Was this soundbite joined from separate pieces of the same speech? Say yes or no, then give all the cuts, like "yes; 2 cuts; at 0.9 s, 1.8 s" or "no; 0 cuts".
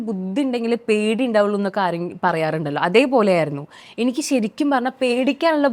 no; 0 cuts